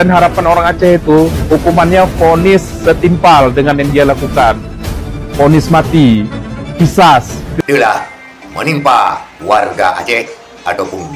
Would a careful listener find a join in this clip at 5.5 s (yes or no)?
no